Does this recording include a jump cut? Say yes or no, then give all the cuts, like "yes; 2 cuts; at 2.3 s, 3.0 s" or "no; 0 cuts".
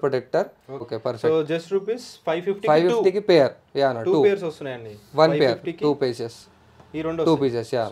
yes; 1 cut; at 0.9 s